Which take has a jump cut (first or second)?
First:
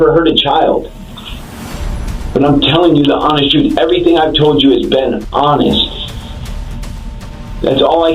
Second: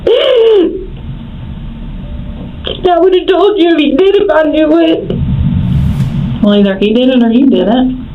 first